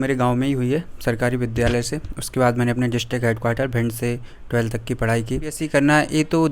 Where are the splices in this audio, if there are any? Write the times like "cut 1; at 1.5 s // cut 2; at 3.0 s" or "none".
cut 1; at 5.6 s